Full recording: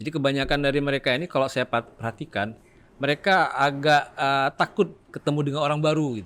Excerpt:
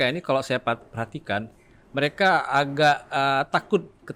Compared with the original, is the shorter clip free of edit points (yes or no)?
yes